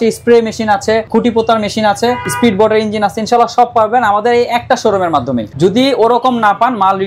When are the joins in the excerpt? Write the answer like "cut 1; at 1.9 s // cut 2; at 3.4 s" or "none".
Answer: cut 1; at 1.1 s // cut 2; at 2.3 s // cut 3; at 5.5 s